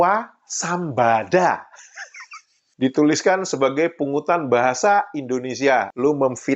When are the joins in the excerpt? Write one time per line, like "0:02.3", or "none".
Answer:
none